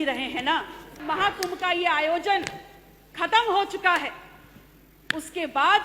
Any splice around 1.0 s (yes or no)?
yes